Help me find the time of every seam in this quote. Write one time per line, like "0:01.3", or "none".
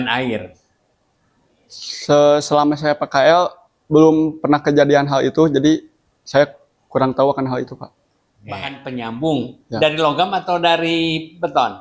0:08.7